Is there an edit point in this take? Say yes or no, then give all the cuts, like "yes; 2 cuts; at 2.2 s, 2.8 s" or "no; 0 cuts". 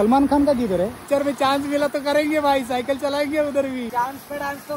yes; 2 cuts; at 1.0 s, 3.9 s